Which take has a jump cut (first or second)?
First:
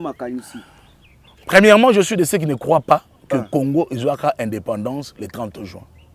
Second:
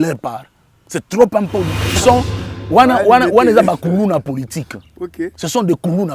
second